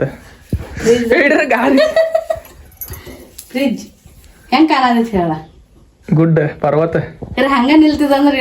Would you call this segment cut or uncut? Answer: uncut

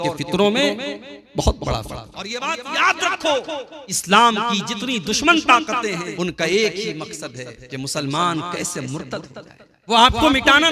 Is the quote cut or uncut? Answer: cut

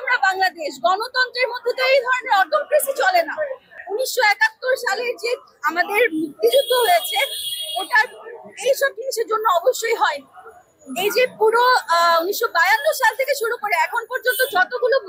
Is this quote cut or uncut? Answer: uncut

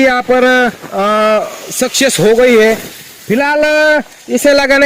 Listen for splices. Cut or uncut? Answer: uncut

